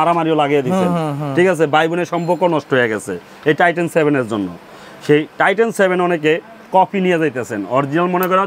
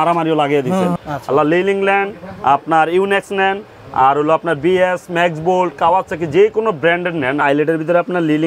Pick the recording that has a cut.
second; 2 cuts; at 1.0 s, 7.4 s

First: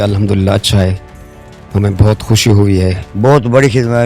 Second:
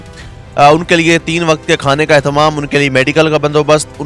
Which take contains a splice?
first; 1 cut; at 3.0 s

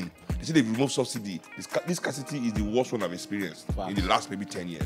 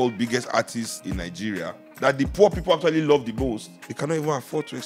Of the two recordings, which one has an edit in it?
second; 2 cuts; at 1.0 s, 3.8 s

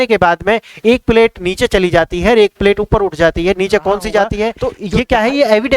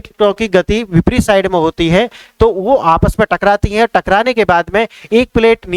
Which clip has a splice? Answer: first; 1 cut; at 4.7 s

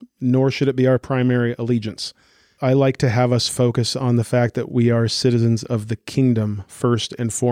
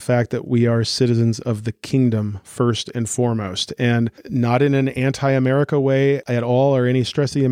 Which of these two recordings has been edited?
second; 2 cuts; at 4.2 s, 6.2 s

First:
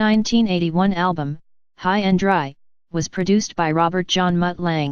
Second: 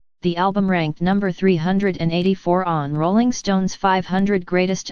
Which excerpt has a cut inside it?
second; 1 cut; at 1.3 s

